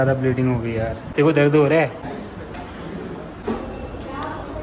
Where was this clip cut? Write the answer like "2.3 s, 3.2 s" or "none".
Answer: 2.0 s, 3.4 s